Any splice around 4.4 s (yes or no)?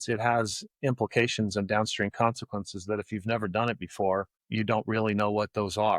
yes